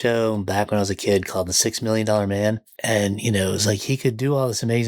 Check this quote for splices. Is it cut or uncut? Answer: cut